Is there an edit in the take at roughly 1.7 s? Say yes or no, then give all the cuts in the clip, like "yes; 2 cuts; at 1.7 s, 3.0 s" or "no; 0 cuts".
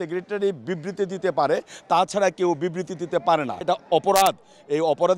no; 1 cut; at 3.6 s